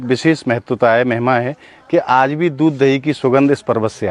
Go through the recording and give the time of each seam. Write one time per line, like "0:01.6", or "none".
none